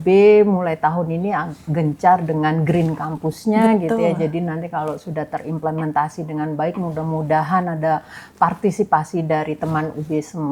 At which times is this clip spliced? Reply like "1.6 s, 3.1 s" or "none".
none